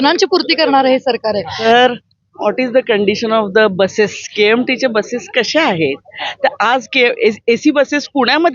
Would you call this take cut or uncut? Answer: cut